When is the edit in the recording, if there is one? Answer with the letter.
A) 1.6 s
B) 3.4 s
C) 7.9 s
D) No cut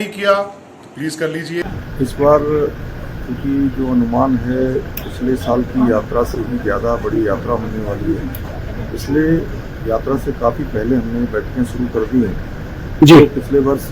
A